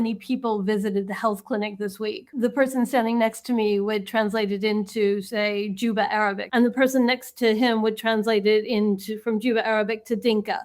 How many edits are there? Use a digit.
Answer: 2